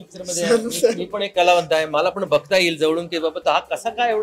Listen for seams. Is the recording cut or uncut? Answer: uncut